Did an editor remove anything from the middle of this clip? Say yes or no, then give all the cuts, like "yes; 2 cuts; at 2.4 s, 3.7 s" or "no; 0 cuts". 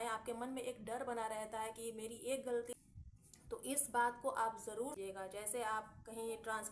yes; 2 cuts; at 2.7 s, 5.0 s